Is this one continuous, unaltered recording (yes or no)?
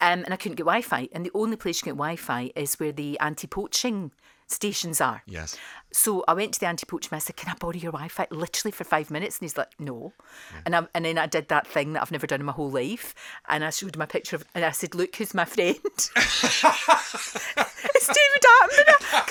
yes